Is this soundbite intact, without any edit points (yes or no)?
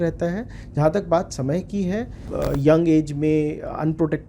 no